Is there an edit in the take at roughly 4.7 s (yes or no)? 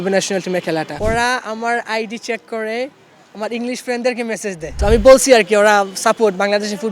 yes